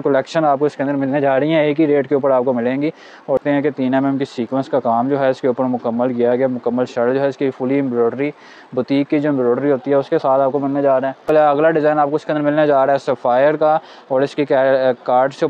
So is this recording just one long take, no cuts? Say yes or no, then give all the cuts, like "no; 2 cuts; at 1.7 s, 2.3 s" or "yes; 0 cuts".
no; 2 cuts; at 3.4 s, 11.3 s